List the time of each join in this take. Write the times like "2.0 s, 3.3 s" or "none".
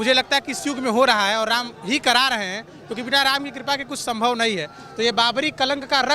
none